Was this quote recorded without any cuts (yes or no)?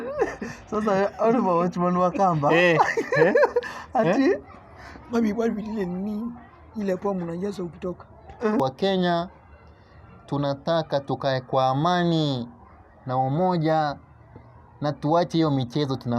no